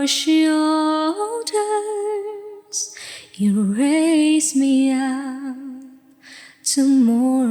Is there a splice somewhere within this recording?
no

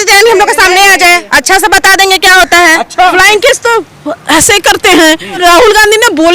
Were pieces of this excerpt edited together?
yes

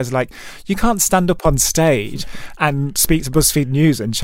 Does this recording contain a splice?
no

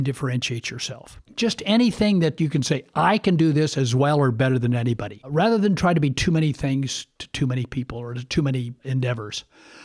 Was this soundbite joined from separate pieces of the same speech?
yes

